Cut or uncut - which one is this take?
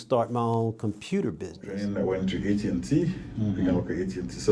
cut